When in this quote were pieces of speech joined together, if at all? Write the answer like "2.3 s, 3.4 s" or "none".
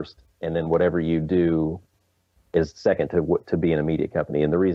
none